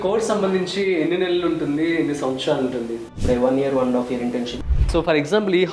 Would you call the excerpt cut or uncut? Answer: cut